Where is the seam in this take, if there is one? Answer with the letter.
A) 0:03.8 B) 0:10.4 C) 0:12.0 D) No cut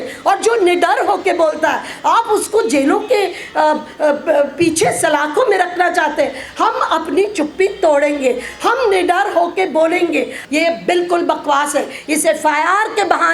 B